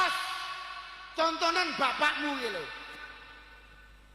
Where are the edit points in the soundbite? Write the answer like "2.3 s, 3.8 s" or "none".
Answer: none